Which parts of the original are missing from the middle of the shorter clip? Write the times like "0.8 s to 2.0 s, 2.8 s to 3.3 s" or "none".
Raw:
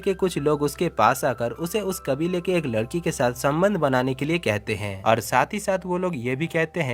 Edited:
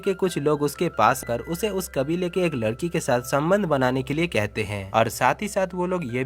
1.2 s to 1.3 s